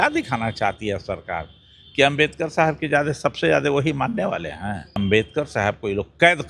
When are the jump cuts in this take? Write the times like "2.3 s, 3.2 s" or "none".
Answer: 5.0 s